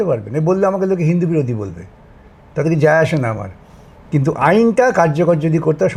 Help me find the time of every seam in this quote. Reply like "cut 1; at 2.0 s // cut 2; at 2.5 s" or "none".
none